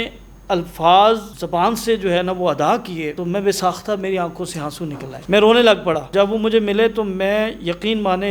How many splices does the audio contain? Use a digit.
4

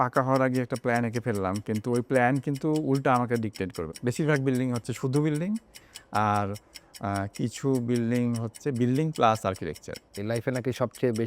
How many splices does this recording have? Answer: 2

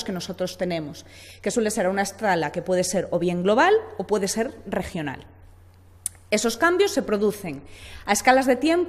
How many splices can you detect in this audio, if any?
0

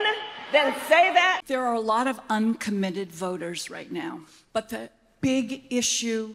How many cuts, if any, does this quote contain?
2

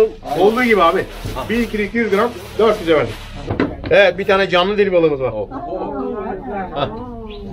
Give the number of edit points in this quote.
1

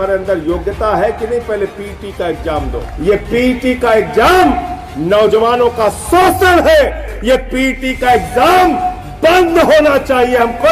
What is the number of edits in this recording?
2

